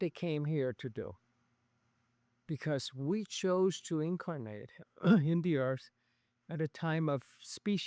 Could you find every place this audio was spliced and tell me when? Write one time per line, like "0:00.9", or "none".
none